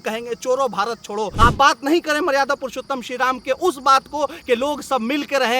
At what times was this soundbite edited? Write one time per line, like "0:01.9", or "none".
0:01.3